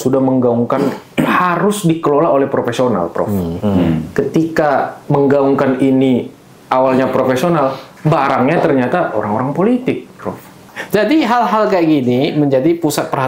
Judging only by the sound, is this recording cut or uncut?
cut